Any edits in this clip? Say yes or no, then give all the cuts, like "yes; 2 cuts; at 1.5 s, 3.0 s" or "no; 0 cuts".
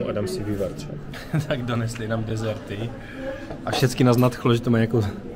yes; 1 cut; at 1.0 s